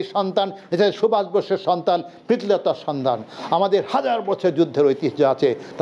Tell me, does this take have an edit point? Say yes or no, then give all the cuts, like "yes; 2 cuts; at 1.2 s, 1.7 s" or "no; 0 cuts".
no; 0 cuts